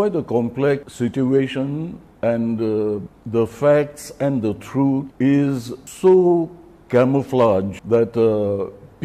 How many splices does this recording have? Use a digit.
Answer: 6